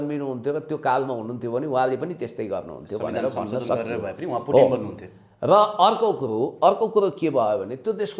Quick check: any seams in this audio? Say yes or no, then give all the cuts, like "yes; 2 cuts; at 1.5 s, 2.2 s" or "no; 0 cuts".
no; 0 cuts